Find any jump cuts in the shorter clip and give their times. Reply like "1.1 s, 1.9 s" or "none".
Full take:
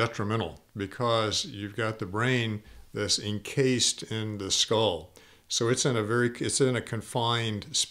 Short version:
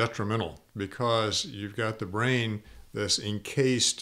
none